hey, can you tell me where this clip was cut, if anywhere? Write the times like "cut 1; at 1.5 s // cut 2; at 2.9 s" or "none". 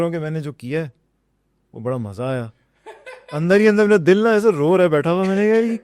none